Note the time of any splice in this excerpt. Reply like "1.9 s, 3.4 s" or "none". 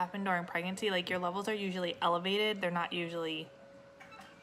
none